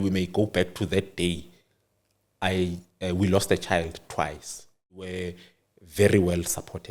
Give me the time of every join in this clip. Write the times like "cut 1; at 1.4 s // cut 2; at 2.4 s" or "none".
cut 1; at 5.2 s